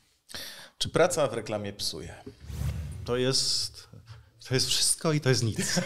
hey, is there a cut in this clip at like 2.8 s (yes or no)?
yes